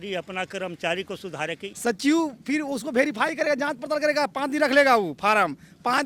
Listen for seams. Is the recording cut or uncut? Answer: cut